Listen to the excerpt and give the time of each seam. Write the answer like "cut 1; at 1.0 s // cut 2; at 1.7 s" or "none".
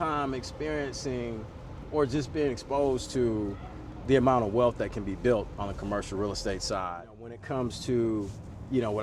cut 1; at 7.4 s